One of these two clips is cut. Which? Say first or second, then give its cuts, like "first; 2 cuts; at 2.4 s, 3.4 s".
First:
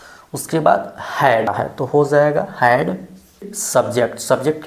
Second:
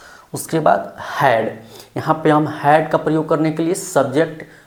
first; 2 cuts; at 1.5 s, 3.6 s